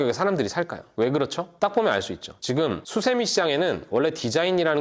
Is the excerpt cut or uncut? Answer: cut